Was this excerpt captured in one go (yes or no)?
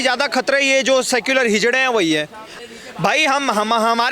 no